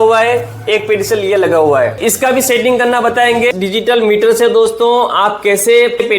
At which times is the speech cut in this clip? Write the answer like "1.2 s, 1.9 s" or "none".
2.0 s, 3.5 s